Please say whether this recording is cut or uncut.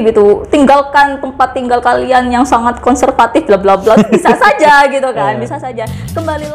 uncut